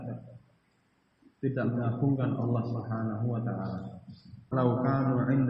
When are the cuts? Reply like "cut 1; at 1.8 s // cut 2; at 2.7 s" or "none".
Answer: cut 1; at 4.5 s